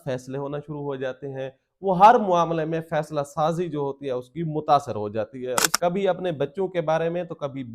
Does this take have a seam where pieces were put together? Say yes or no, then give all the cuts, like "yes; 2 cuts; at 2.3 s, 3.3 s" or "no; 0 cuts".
yes; 1 cut; at 5.7 s